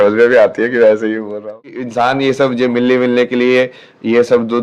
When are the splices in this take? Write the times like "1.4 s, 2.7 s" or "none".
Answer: 1.9 s